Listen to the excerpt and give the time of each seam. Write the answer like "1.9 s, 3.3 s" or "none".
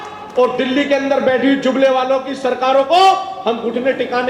none